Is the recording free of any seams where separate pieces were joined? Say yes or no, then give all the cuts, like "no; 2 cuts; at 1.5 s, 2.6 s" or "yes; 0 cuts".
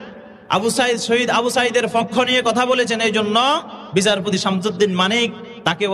yes; 0 cuts